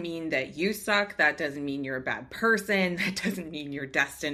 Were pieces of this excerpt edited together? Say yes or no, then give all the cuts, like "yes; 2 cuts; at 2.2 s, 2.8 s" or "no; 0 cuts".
no; 0 cuts